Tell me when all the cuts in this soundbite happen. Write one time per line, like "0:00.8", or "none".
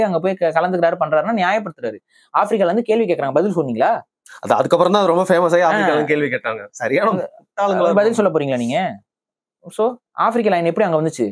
none